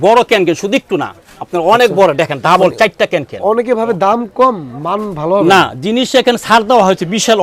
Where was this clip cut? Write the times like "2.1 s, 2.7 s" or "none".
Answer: none